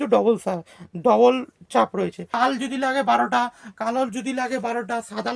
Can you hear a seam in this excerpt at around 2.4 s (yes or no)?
yes